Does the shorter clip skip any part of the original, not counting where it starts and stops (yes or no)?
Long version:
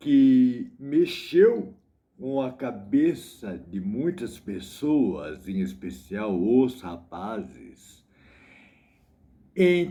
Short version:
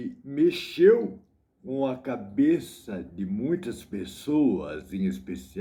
no